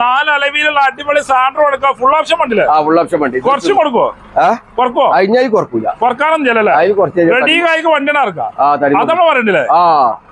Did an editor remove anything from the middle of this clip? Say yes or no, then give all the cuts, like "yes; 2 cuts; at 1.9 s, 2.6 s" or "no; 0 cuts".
no; 0 cuts